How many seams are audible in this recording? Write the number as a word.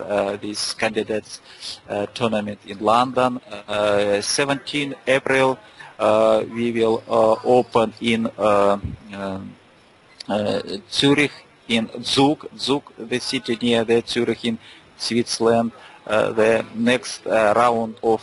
one